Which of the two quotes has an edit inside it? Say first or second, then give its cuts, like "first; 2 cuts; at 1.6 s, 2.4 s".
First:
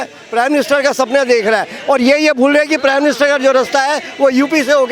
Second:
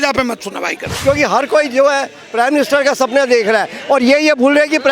second; 1 cut; at 0.9 s